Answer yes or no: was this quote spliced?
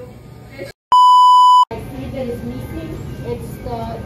yes